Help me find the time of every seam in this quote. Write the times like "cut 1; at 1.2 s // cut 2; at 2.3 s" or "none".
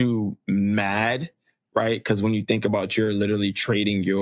none